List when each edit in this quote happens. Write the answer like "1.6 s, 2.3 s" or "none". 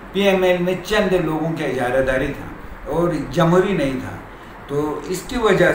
none